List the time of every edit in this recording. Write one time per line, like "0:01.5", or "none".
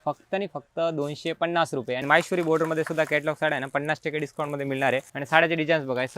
0:02.0
0:05.1